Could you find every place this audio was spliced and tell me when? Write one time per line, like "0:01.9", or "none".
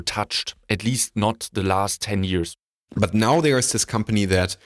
0:02.5